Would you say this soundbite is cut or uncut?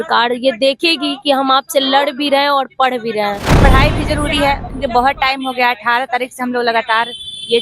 cut